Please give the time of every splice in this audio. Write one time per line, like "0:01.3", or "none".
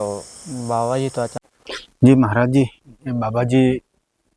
0:02.0